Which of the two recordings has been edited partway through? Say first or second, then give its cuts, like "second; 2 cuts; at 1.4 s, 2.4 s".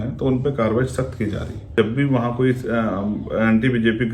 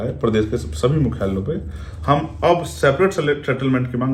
first; 1 cut; at 1.7 s